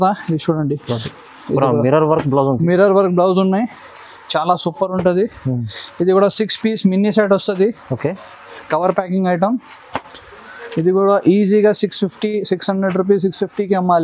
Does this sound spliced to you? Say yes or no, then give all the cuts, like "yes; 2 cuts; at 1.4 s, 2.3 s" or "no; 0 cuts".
no; 0 cuts